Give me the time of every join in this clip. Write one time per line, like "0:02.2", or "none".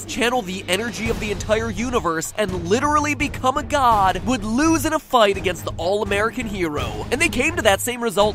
none

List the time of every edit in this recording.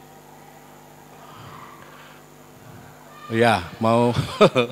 none

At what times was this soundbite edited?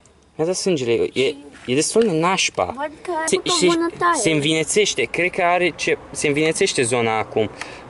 0:03.3

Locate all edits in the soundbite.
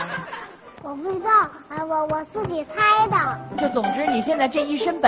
0:03.4

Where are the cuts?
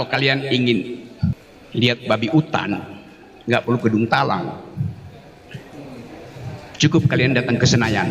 0:01.5

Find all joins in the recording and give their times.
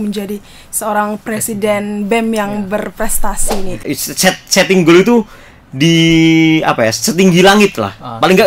0:03.8

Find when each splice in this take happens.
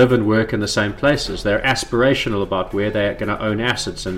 none

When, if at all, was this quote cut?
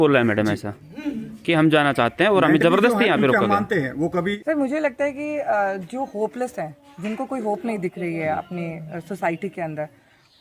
0:04.4

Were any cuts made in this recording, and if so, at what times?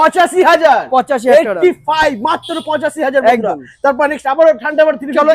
none

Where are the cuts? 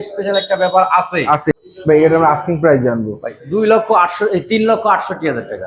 0:01.5

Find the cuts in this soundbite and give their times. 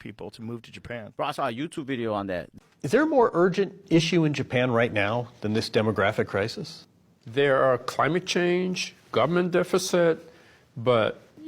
0:02.5

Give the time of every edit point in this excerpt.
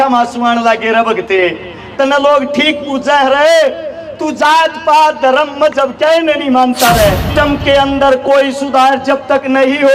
0:07.3

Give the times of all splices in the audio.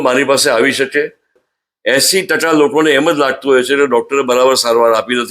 0:01.4

